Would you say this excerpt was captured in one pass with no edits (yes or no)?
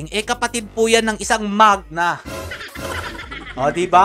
yes